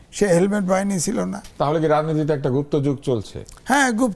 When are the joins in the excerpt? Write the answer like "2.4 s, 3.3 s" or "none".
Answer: 1.5 s